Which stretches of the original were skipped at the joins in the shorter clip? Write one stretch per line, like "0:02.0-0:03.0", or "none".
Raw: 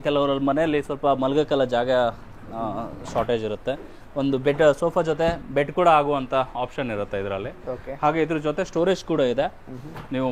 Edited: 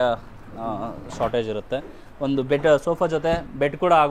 none